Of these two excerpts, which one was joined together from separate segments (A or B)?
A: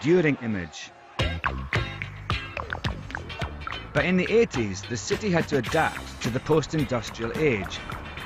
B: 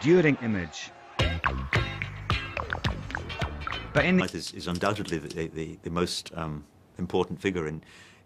A